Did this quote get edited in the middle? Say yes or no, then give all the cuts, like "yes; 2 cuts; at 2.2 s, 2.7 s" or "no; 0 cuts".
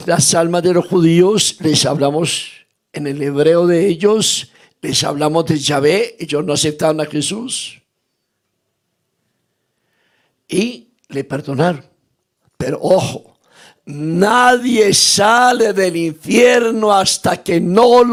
no; 0 cuts